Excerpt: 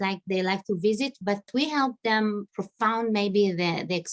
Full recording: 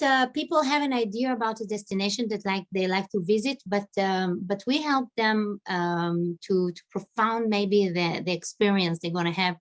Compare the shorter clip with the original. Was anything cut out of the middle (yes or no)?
yes